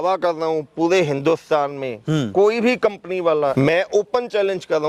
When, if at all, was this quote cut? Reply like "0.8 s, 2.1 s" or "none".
3.5 s